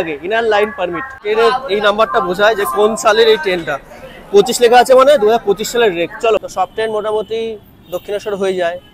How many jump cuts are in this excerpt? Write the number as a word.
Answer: two